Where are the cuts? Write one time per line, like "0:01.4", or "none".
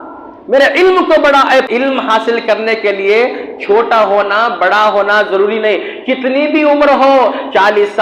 0:01.5